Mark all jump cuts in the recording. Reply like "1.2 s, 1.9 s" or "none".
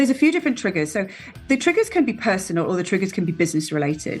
1.4 s